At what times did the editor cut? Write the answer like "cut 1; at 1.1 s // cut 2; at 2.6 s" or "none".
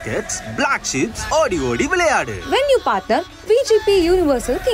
cut 1; at 2.4 s